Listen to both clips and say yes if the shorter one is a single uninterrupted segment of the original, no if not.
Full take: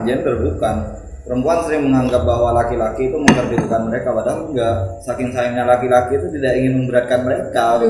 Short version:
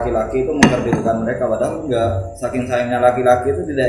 yes